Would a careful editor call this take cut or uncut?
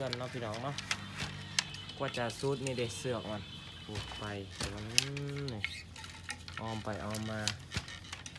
uncut